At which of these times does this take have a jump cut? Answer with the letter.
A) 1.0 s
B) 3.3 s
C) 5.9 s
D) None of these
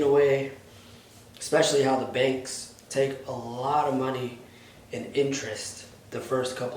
D